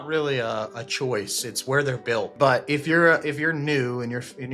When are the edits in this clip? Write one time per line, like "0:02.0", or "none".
0:02.3